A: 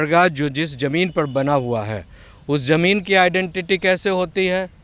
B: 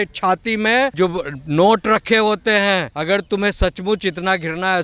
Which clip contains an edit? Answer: B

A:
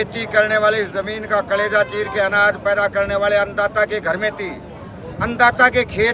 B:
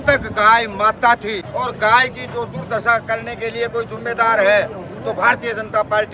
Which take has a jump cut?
B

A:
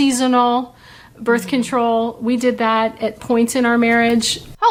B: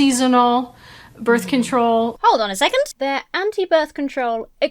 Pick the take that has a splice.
B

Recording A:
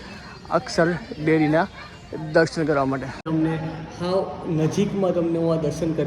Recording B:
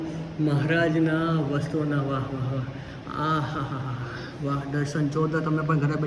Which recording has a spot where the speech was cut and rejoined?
A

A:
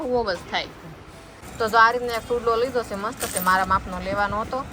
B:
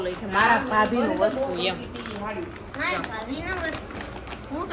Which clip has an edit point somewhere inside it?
A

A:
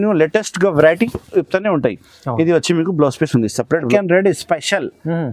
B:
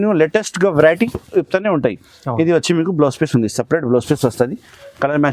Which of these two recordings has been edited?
A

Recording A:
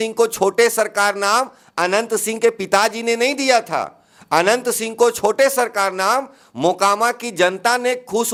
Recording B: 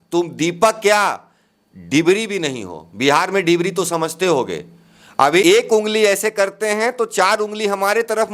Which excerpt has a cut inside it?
B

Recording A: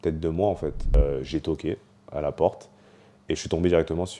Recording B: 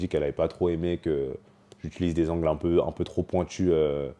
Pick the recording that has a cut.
A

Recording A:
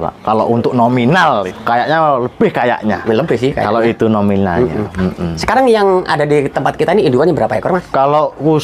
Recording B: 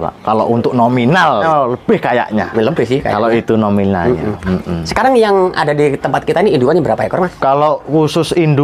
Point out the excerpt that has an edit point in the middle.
B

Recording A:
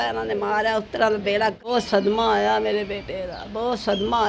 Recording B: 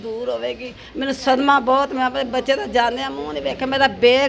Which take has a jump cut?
A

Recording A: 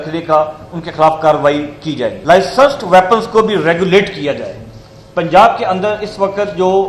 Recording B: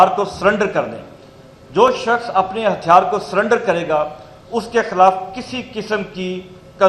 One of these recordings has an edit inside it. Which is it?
A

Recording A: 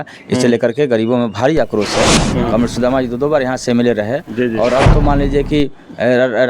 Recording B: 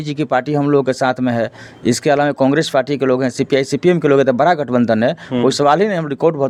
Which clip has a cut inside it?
A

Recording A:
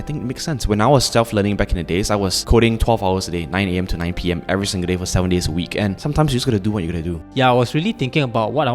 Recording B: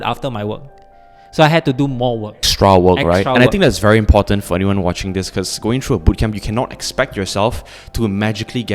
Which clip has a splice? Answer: A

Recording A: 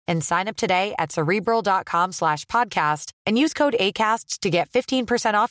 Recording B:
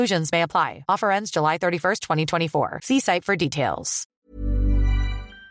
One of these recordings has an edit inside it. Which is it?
B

